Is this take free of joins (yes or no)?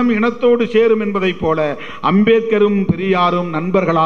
yes